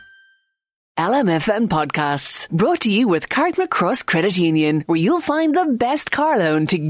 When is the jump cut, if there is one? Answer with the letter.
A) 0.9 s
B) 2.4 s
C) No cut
A